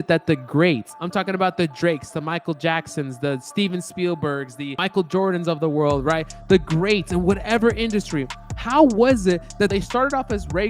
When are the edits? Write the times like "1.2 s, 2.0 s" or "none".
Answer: 0.9 s, 4.8 s